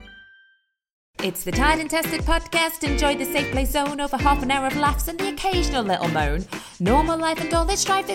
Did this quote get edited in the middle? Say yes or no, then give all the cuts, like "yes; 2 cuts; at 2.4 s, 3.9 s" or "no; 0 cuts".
yes; 1 cut; at 1.1 s